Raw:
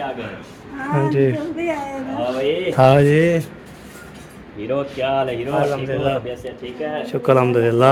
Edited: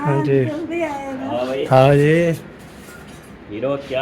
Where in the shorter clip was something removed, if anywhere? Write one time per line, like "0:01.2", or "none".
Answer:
0:01.6